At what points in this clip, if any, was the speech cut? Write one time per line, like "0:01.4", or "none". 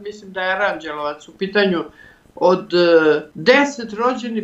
0:03.3